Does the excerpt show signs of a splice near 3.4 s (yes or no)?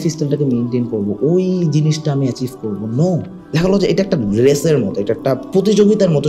yes